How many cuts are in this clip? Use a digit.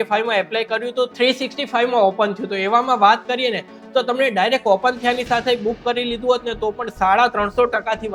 0